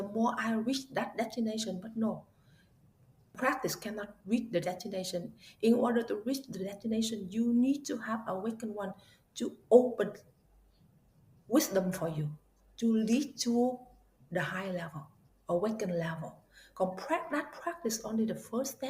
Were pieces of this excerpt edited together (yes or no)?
yes